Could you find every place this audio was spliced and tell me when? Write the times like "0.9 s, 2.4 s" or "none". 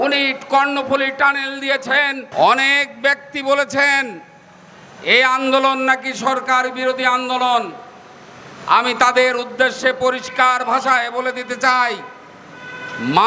2.2 s